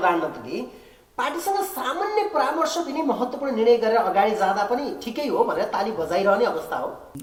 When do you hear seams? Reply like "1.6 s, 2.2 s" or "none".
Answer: none